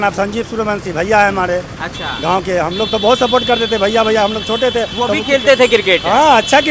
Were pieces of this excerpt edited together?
no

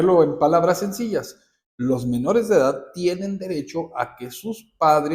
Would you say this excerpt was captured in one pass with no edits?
yes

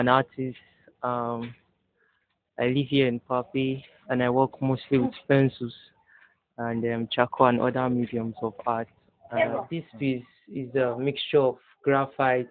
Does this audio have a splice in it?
yes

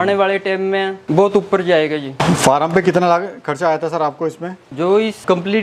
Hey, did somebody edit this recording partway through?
no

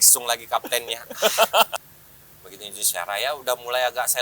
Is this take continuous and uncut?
no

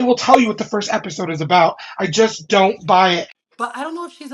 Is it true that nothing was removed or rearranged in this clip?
no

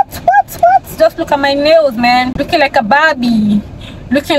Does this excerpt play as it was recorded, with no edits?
no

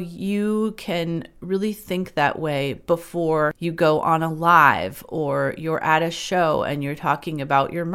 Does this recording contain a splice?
yes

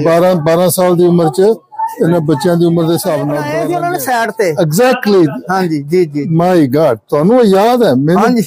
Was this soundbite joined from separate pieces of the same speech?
yes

